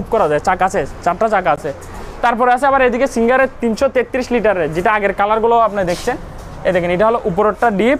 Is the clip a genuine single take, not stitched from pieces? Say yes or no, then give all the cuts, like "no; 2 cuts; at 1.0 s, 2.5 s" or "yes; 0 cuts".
yes; 0 cuts